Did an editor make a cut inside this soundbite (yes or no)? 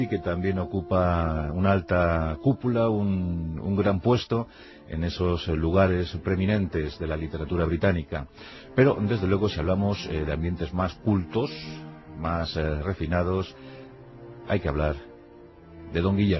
yes